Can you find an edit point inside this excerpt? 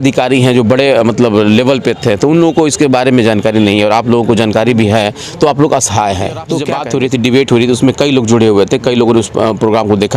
yes; 1 cut; at 6.6 s

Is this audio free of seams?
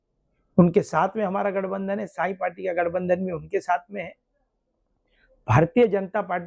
yes; 0 cuts

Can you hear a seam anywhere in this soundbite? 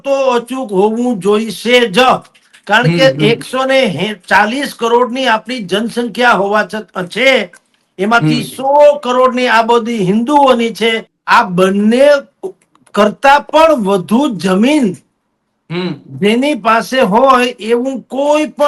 yes; 1 cut; at 11.1 s

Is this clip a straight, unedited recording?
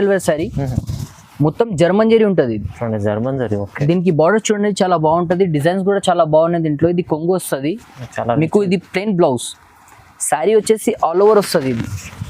yes; 0 cuts

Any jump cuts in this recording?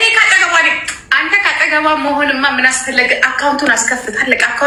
no; 0 cuts

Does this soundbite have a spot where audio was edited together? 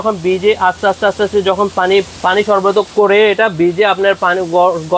no; 0 cuts

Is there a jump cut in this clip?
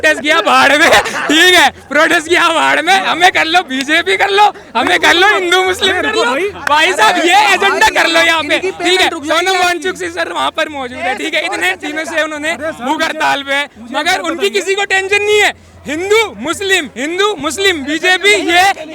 no; 0 cuts

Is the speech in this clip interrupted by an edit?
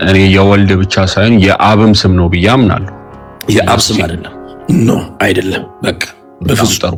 no; 0 cuts

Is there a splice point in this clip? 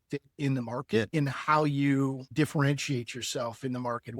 yes; 1 cut; at 1.1 s

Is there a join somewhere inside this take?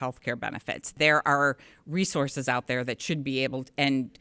yes; 1 cut; at 0.9 s

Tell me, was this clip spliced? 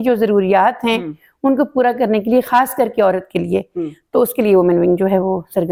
no; 0 cuts

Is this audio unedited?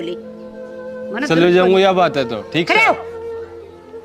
no; 1 cut; at 3.0 s

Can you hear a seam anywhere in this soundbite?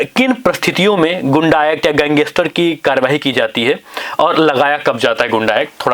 no; 0 cuts

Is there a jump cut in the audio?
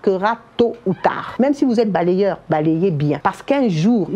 yes; 2 cuts; at 1.2 s, 3.2 s

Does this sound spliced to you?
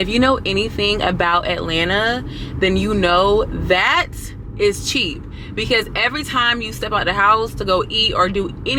no; 0 cuts

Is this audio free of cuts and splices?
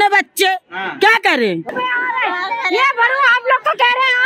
no; 1 cut; at 1.7 s

